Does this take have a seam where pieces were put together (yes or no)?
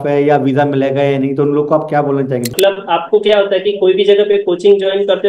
yes